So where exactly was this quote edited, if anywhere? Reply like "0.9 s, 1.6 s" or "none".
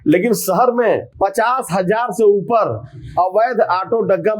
1.1 s